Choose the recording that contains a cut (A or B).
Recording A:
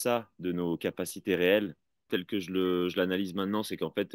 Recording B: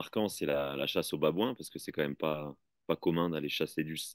A